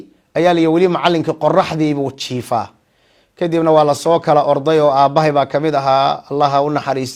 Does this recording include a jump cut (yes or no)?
no